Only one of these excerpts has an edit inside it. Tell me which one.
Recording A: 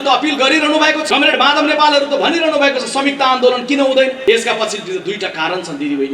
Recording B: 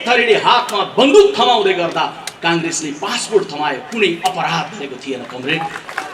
A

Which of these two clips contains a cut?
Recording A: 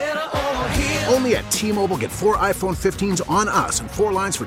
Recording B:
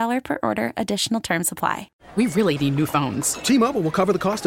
B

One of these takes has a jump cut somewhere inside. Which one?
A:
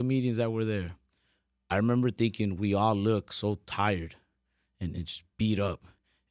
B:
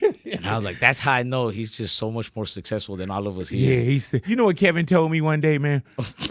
B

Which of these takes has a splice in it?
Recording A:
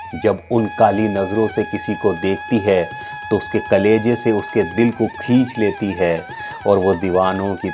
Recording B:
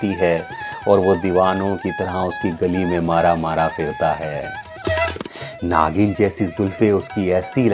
B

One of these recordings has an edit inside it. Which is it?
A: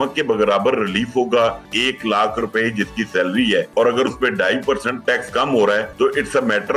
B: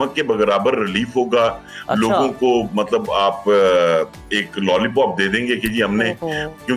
A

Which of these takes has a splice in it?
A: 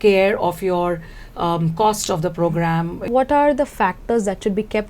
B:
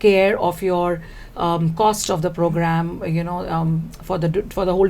A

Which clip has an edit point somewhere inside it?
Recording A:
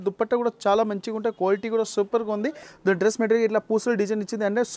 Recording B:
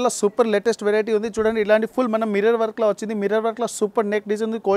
A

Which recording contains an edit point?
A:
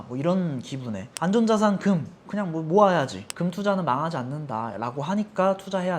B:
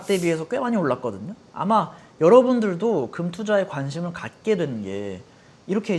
A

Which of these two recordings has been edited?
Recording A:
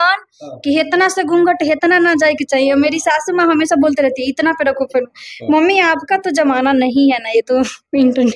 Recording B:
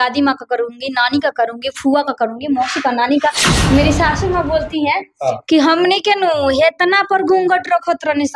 B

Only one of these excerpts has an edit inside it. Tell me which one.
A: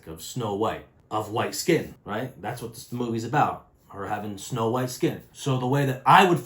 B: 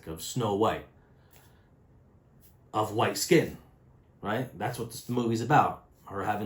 A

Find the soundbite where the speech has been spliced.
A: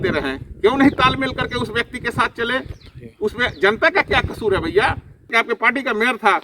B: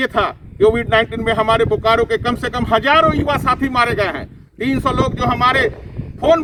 A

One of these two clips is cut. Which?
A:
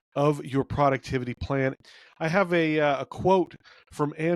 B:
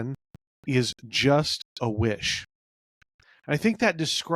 A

